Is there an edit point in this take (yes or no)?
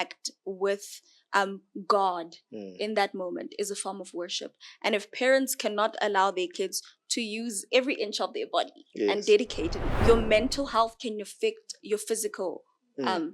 yes